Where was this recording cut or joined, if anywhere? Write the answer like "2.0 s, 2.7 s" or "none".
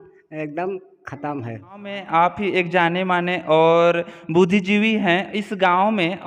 1.9 s